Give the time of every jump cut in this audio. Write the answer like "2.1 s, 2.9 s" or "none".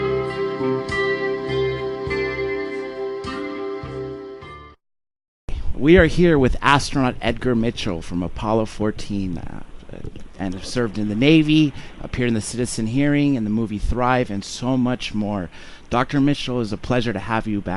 1.4 s